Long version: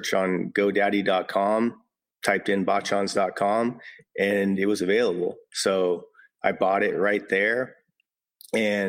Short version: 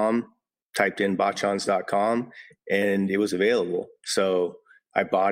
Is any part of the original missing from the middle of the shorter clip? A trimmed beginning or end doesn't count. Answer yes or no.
no